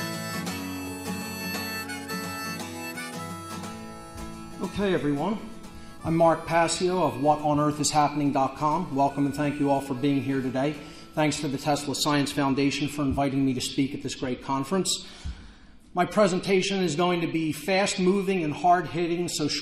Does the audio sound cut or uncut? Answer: cut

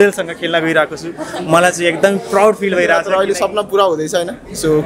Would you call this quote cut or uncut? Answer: cut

